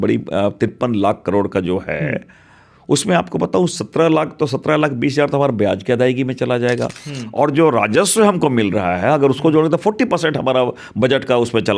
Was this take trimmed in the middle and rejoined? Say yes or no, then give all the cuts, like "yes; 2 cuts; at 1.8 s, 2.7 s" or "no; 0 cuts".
no; 0 cuts